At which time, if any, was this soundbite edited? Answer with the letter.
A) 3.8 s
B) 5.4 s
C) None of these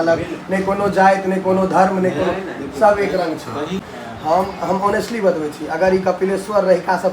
A